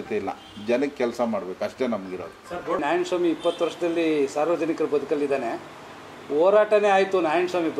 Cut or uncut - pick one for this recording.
cut